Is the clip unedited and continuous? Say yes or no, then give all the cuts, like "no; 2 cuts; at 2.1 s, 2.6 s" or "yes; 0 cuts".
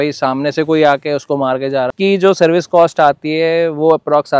no; 1 cut; at 1.9 s